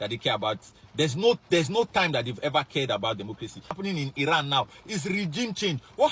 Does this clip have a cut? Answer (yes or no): yes